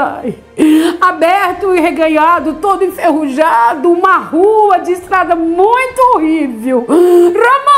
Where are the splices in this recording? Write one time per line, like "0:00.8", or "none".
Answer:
none